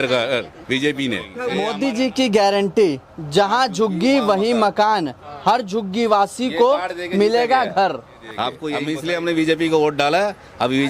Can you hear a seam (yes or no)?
yes